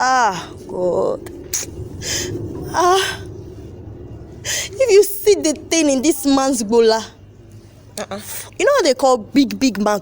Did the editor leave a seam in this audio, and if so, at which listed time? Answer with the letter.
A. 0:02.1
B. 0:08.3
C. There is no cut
B